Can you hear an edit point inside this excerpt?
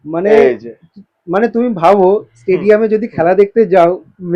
no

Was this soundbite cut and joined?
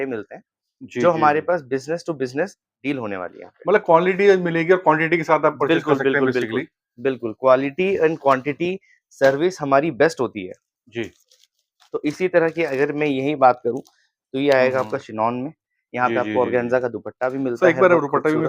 no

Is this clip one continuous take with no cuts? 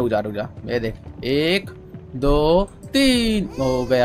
yes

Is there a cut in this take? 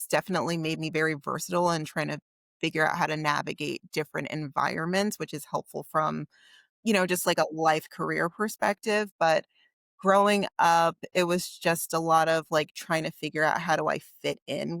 no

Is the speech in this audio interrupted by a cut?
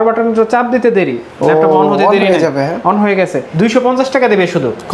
yes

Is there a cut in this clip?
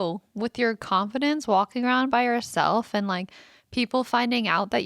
no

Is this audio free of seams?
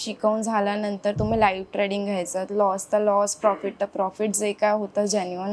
yes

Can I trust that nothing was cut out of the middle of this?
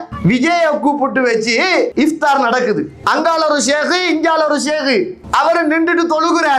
no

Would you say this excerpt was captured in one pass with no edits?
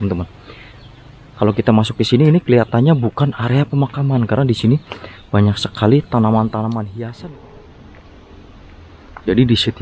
no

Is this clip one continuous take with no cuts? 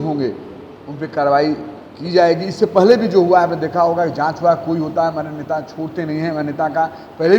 yes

